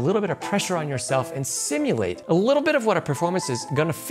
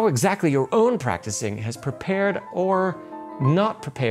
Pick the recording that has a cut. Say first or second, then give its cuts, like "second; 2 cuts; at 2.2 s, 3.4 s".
first; 1 cut; at 2.2 s